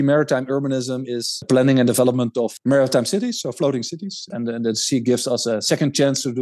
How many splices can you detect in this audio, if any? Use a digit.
3